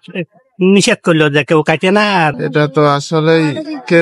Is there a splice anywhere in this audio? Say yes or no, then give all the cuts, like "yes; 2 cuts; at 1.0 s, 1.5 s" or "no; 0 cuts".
yes; 1 cut; at 2.4 s